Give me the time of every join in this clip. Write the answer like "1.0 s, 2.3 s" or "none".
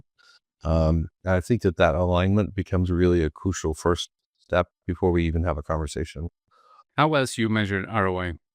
6.7 s